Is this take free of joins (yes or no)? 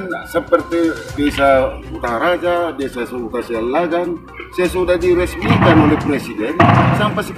no